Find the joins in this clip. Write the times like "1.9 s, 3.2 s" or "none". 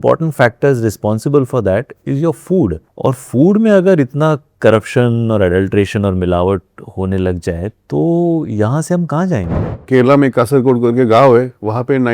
2.9 s, 9.7 s